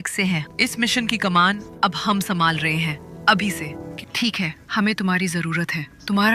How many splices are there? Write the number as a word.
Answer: one